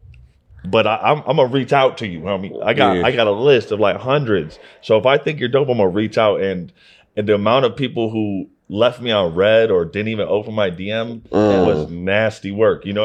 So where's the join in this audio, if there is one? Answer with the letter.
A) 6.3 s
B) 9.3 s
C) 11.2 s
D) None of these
D